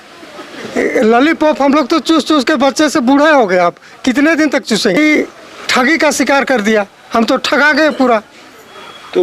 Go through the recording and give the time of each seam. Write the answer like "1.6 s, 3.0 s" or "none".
5.0 s